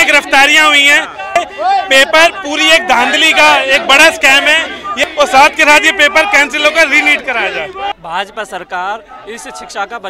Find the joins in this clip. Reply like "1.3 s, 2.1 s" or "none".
1.4 s, 4.9 s, 7.9 s